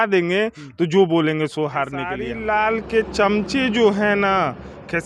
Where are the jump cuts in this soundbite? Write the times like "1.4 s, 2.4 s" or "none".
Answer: 2.2 s